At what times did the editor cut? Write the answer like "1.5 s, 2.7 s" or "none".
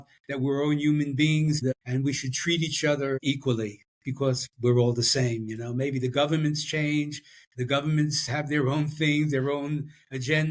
1.6 s